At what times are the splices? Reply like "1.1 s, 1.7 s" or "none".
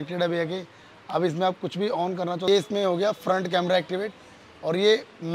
2.5 s